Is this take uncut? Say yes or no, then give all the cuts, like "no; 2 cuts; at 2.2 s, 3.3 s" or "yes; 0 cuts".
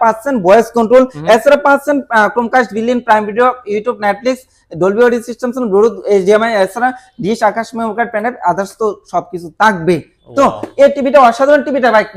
yes; 0 cuts